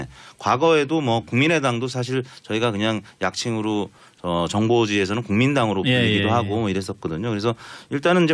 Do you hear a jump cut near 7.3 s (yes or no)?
no